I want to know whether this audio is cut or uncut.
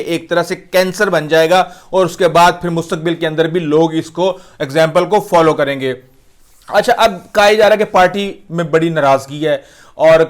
uncut